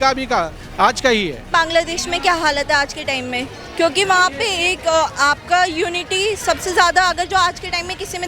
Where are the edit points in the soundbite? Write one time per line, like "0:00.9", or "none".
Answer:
0:01.1